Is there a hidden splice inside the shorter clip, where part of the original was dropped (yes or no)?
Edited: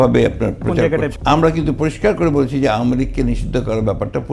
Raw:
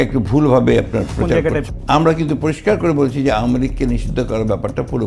yes